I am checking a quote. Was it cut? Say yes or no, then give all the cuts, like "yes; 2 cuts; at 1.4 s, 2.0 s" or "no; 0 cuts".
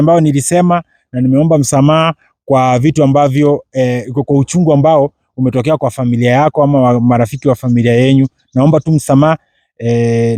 no; 0 cuts